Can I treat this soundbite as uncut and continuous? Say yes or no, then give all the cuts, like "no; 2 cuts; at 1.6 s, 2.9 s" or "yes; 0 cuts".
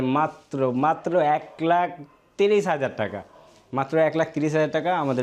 yes; 0 cuts